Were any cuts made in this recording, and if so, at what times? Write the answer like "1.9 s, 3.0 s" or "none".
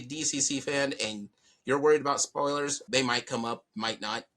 2.8 s